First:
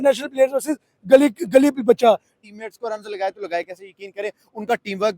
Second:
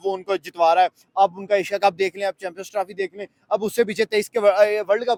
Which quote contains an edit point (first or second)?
first